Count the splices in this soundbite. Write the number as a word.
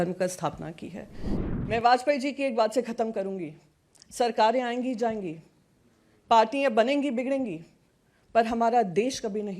one